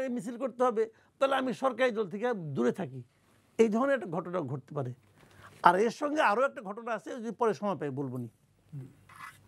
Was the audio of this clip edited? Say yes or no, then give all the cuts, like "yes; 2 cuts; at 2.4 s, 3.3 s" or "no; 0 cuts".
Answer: no; 0 cuts